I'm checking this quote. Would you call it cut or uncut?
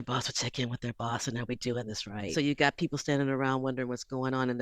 cut